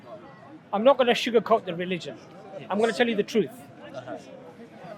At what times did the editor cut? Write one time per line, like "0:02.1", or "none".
0:03.9